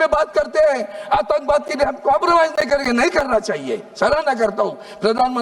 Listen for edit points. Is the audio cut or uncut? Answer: uncut